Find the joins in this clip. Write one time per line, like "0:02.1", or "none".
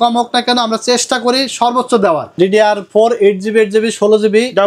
0:02.3

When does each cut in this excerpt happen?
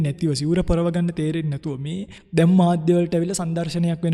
0:02.1

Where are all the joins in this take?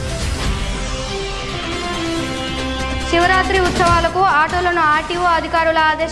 0:01.1

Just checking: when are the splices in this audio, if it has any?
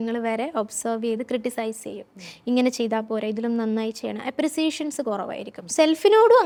none

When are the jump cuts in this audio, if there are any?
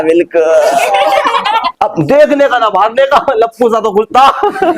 0:01.7

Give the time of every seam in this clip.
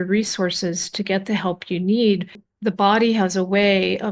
0:02.4

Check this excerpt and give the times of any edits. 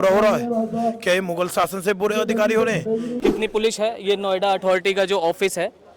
0:03.3

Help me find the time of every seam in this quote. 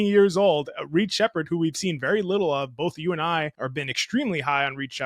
0:03.6

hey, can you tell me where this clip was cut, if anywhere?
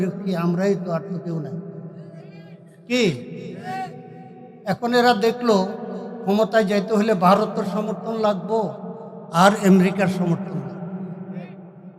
none

